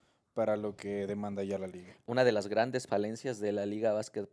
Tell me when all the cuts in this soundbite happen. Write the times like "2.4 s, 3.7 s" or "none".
1.9 s